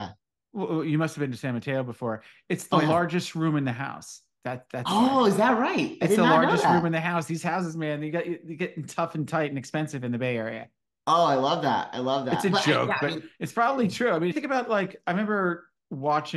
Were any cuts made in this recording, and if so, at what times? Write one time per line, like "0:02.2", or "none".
0:14.3